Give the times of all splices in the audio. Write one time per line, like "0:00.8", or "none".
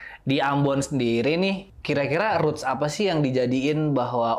0:01.7